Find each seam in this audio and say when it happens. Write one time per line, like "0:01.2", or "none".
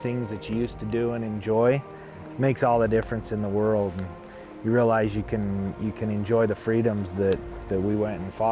none